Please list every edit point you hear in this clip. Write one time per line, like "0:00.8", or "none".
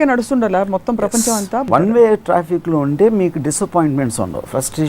0:01.7